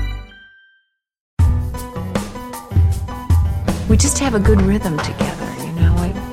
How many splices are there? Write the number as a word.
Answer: one